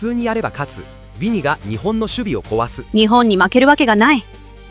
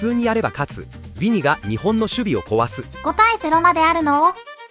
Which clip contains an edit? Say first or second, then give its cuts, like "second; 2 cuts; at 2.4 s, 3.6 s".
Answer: first; 1 cut; at 2.8 s